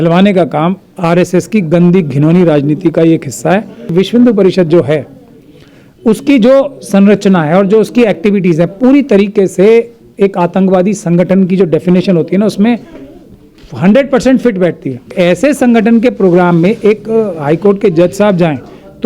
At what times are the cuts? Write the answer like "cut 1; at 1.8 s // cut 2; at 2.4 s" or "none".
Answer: cut 1; at 3.9 s // cut 2; at 15.1 s